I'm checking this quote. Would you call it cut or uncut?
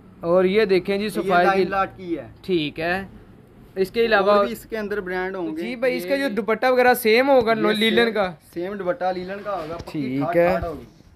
cut